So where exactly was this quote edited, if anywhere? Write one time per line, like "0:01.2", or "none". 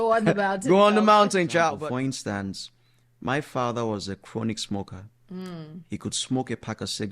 0:01.8